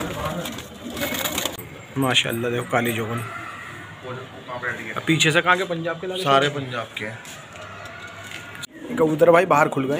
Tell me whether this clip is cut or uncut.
cut